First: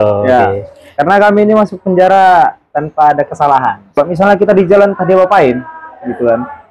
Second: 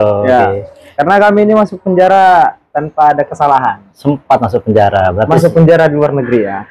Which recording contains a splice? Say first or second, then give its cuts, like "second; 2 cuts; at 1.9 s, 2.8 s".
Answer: first; 1 cut; at 4.0 s